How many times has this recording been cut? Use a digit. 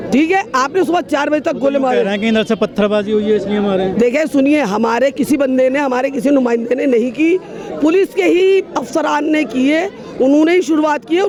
0